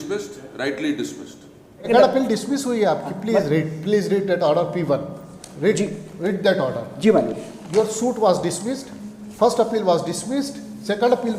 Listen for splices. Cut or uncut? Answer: cut